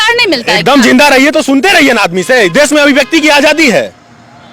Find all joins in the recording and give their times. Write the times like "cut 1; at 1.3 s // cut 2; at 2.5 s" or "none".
none